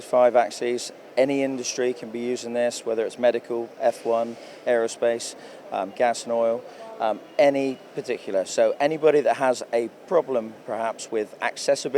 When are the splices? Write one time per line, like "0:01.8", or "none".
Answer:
none